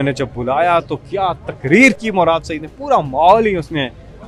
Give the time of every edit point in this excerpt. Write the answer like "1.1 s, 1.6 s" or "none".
none